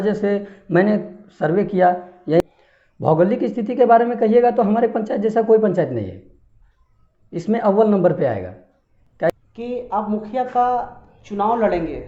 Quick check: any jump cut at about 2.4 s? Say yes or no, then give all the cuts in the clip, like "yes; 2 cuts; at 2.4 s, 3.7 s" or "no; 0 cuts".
yes; 2 cuts; at 2.4 s, 9.3 s